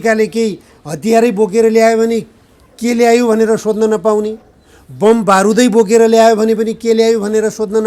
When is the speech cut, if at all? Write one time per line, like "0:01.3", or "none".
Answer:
none